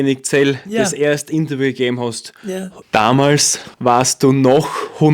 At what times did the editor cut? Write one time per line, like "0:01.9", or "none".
0:02.7
0:03.6